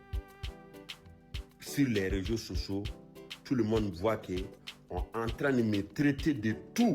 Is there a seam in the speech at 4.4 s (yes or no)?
no